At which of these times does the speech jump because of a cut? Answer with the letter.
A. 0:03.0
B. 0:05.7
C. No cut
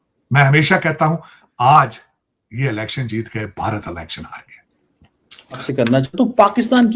B